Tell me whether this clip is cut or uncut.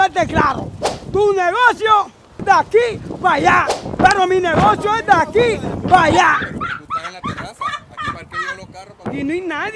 uncut